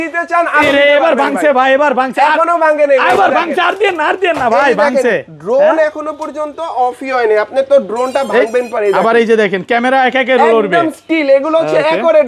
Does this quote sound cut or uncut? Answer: uncut